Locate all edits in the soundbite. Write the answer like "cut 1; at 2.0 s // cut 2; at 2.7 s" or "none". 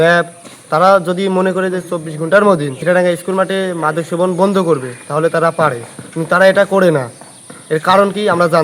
cut 1; at 2.8 s

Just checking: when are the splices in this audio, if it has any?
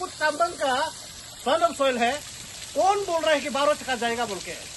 none

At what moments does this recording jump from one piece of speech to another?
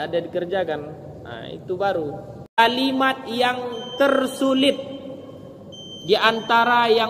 cut 1; at 2.6 s

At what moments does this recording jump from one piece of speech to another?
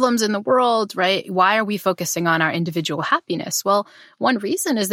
none

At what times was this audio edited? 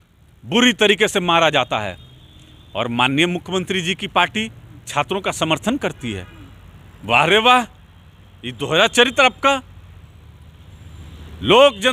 none

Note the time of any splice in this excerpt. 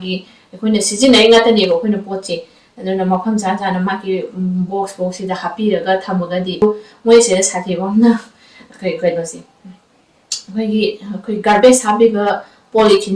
cut 1; at 6.6 s

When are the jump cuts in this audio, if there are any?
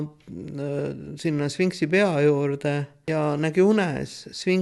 cut 1; at 2.9 s

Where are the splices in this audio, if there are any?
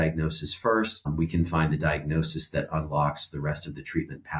cut 1; at 1.1 s

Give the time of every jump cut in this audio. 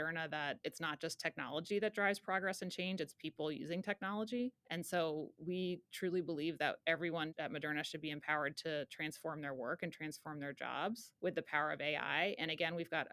none

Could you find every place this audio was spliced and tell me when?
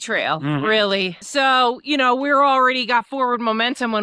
cut 1; at 1.2 s

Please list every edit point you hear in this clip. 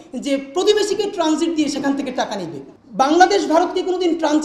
none

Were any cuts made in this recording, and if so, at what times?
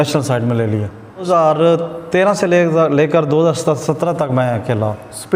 cut 1; at 1.2 s

